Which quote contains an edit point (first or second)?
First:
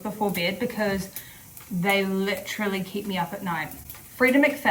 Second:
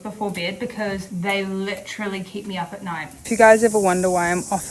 second